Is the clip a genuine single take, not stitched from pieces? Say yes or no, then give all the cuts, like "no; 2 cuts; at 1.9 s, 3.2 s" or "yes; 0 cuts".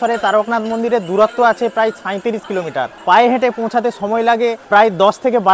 no; 2 cuts; at 2.9 s, 4.6 s